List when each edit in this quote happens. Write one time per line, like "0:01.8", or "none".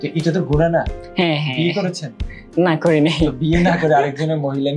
none